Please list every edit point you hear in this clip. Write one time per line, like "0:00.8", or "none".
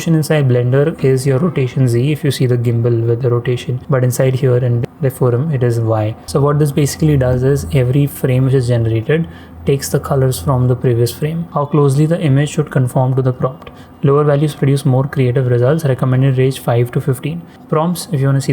0:03.7
0:04.9
0:06.2
0:11.4
0:17.5